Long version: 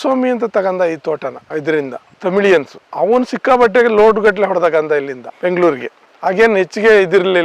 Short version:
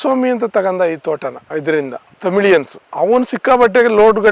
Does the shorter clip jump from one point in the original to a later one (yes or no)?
no